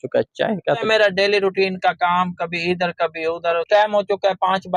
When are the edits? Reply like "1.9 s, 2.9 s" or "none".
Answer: 0.8 s, 3.7 s